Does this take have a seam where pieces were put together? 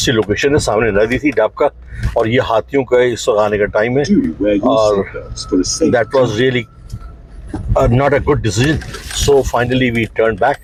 no; 0 cuts

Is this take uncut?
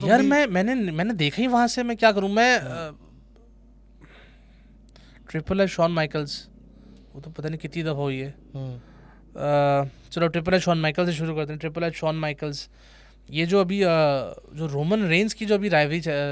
yes; 0 cuts

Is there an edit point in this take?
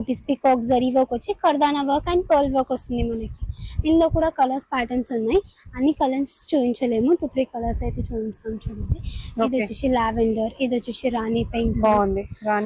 no; 0 cuts

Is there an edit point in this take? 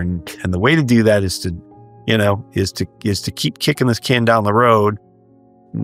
no; 0 cuts

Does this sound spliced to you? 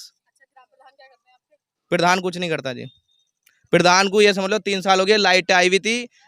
no; 0 cuts

